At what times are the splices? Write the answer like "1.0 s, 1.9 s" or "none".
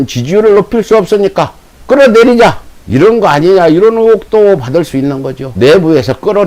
5.5 s

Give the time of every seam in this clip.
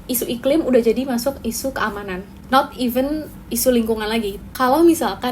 2.3 s, 4.4 s

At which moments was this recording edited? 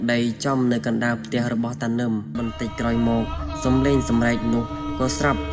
2.4 s

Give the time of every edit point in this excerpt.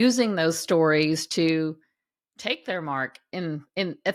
none

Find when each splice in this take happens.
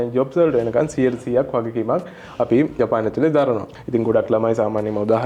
2.7 s, 3.7 s

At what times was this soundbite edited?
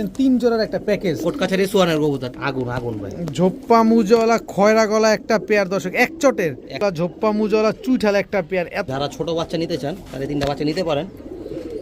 2.3 s, 6.8 s, 8.8 s

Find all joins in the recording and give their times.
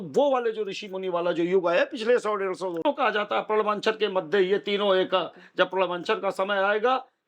2.8 s

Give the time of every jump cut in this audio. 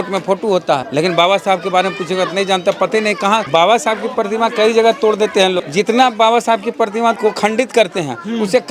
0.9 s, 3.5 s, 5.6 s, 7.2 s

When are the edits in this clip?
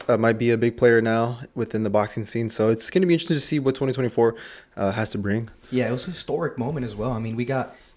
none

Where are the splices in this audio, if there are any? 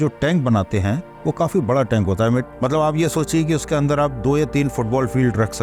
none

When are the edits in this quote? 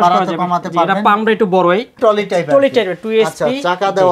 1.9 s

